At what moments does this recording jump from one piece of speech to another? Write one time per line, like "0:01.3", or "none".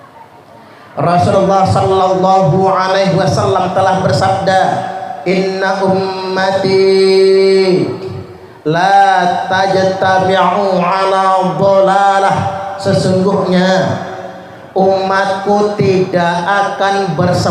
none